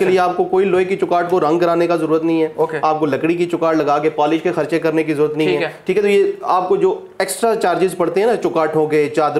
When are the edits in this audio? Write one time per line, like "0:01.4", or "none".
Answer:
none